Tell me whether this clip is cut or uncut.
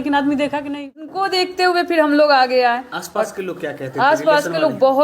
cut